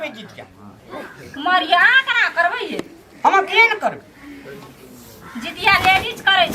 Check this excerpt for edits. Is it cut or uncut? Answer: uncut